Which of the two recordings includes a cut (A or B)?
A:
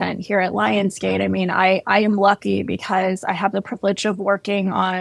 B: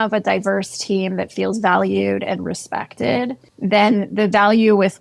B